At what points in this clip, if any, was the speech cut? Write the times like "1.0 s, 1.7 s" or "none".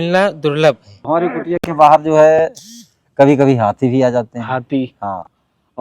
0.9 s

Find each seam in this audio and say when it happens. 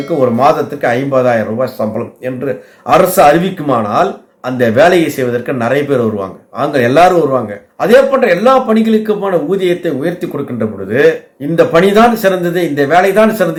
none

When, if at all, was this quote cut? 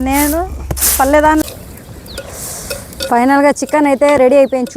1.4 s

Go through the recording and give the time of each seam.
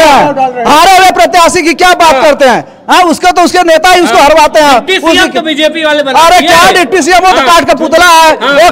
none

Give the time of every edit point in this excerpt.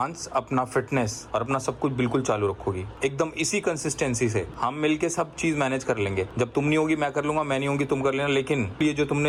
none

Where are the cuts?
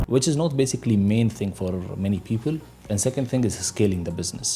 none

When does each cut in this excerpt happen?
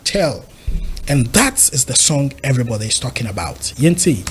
none

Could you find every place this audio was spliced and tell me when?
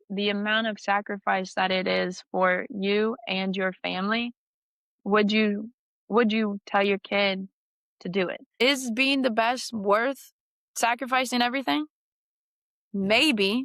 8.4 s

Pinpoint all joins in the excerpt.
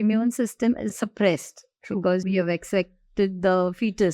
0.9 s, 2.2 s

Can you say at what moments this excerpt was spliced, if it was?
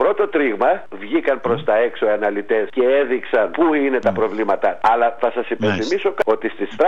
0.9 s, 2.7 s, 3.5 s, 4.8 s, 6.2 s

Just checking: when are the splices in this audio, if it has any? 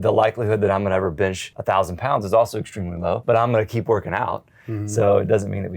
1.5 s, 3.2 s

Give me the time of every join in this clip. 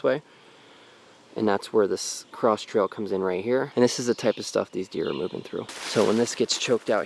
3.7 s, 5.8 s

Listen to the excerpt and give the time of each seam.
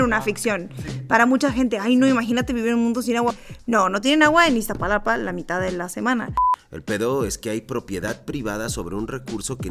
3.4 s, 6.4 s

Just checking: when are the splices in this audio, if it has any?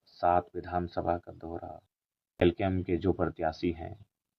2.4 s

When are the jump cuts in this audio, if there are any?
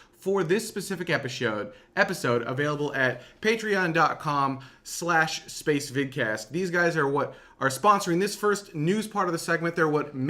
6.1 s

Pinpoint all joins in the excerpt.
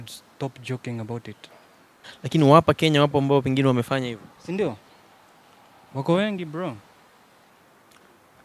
2.1 s, 7.5 s

